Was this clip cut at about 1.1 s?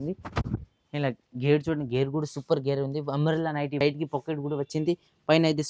no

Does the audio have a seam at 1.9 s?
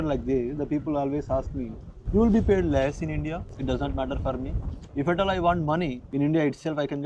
no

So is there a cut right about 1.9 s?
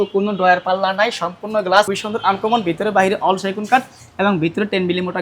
yes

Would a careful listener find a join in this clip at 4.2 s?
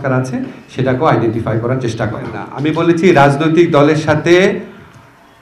no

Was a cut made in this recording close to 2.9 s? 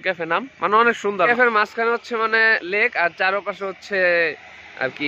no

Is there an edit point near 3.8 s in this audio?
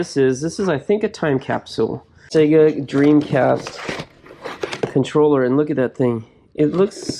no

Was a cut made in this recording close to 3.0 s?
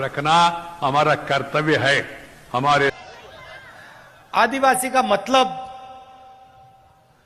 yes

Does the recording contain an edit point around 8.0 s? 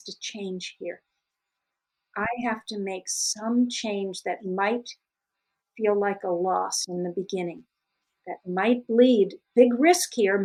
no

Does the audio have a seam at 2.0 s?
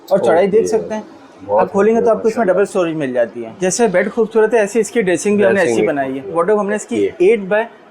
no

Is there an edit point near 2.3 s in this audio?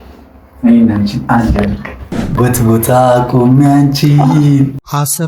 yes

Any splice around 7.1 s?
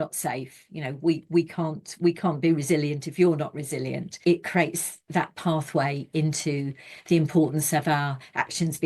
no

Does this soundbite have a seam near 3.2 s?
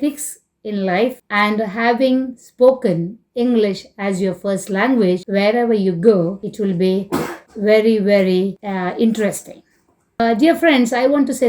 no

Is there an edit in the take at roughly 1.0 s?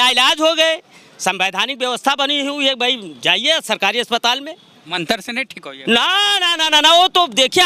no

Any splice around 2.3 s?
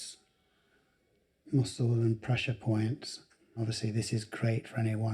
no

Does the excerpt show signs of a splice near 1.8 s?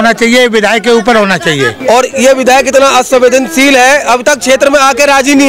yes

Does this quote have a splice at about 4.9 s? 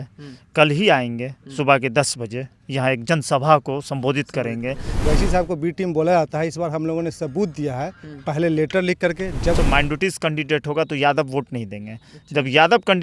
yes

